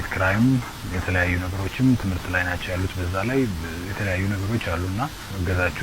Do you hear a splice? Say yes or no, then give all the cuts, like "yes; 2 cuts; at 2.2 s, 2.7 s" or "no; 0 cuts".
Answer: no; 0 cuts